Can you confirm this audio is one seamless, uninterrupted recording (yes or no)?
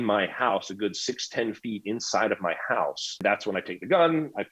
no